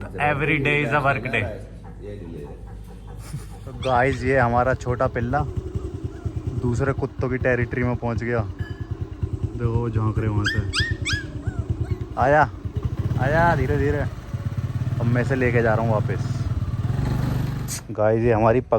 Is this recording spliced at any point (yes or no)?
yes